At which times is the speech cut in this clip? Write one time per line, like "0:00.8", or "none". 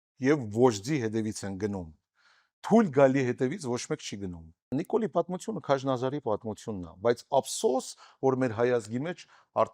0:04.7